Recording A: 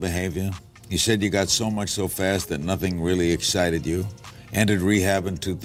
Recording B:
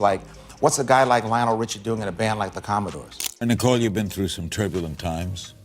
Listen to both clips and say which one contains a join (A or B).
B